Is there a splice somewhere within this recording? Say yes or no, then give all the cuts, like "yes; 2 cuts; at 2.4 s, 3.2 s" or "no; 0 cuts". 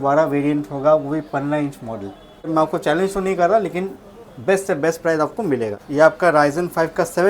yes; 2 cuts; at 2.5 s, 5.8 s